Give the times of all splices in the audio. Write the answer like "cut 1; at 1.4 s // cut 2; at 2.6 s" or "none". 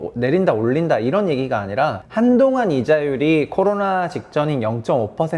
cut 1; at 2.0 s